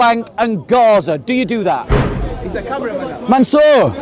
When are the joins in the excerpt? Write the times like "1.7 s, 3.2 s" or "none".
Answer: 2.0 s